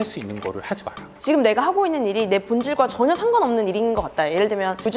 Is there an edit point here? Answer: yes; 1 cut; at 1.1 s

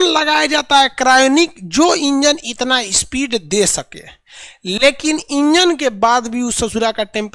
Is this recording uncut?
yes; 0 cuts

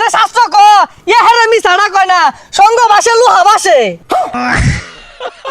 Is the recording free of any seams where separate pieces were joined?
no; 1 cut; at 4.4 s

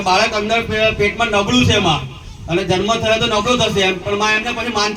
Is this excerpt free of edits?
yes; 0 cuts

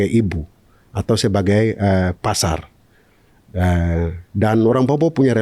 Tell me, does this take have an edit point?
no; 0 cuts

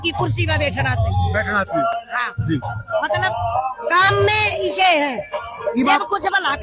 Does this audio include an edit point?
no; 0 cuts

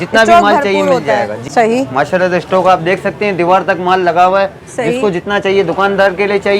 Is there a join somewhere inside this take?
yes; 1 cut; at 1.4 s

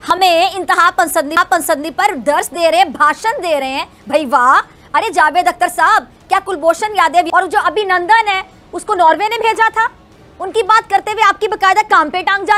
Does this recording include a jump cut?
no; 0 cuts

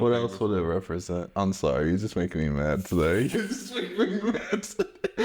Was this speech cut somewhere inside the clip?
no; 0 cuts

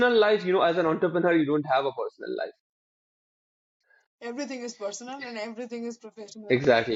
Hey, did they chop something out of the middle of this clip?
no; 0 cuts

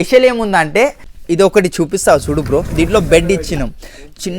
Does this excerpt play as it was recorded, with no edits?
no; 1 cut; at 1.1 s

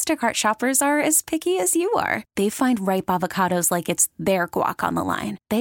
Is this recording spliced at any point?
no; 0 cuts

